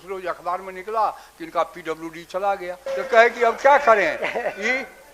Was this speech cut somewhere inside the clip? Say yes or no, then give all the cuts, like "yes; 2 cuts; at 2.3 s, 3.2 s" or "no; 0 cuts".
yes; 1 cut; at 2.8 s